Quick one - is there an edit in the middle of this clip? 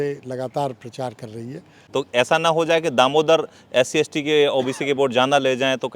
yes; 1 cut; at 1.8 s

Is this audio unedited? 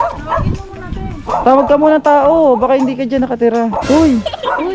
no; 1 cut; at 3.8 s

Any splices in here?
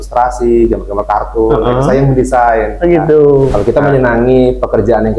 yes; 1 cut; at 3.5 s

